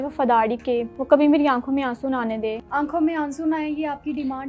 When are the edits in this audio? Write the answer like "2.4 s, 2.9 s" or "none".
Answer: 0.9 s, 2.6 s